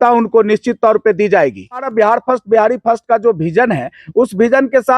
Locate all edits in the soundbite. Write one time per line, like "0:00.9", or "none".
0:01.9